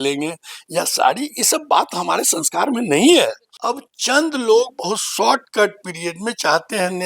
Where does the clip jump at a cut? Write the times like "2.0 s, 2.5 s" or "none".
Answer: 3.5 s

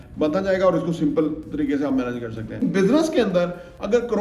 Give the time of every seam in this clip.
2.6 s

